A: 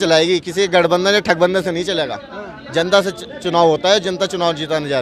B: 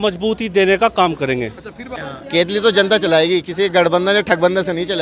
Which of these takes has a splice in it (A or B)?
B